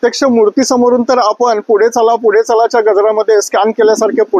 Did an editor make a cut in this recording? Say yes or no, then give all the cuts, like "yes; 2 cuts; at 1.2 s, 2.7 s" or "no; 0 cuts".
no; 0 cuts